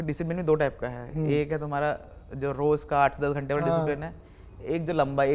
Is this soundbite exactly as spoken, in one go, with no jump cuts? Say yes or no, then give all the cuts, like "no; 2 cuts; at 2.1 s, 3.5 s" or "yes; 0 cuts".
yes; 0 cuts